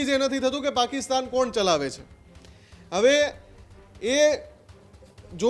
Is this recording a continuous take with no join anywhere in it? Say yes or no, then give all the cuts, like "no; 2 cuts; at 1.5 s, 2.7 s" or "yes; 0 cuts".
yes; 0 cuts